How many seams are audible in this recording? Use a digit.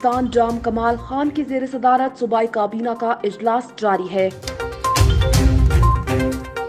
1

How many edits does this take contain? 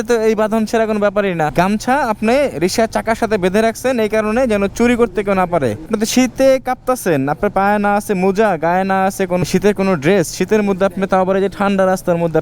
3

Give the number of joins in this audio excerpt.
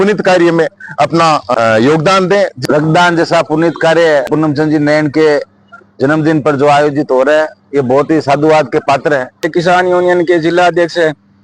4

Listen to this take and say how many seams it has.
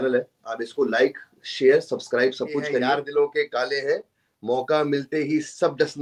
1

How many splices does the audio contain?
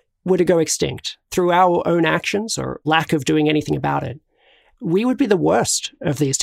2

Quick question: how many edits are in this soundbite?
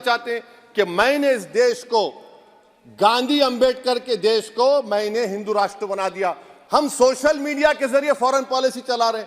1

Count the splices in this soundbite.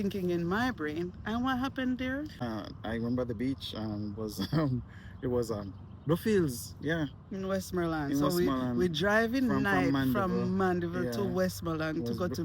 1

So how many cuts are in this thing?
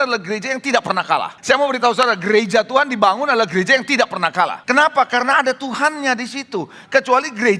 2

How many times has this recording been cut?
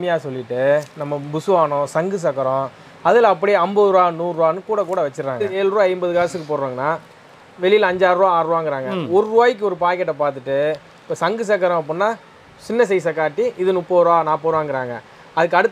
1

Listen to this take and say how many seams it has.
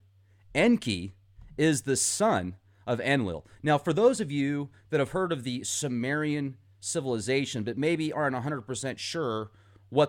1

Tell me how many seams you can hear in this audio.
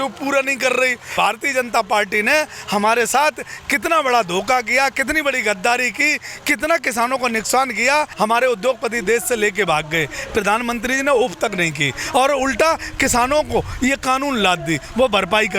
2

